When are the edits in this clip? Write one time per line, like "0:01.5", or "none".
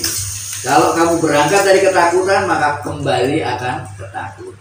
none